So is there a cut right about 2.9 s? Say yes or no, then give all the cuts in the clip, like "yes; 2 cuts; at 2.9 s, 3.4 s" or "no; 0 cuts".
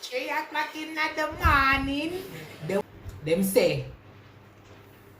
yes; 1 cut; at 2.9 s